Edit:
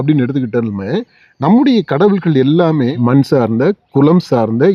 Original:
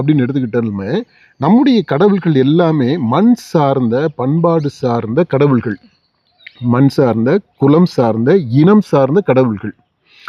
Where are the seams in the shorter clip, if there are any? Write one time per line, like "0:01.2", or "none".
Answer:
0:02.9